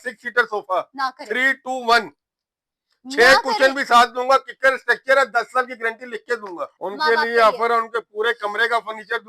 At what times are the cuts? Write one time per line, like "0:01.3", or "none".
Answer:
0:06.7